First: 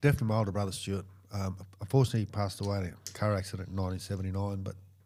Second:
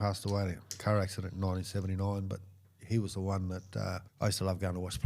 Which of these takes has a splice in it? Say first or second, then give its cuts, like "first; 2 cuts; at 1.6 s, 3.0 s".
second; 1 cut; at 4.1 s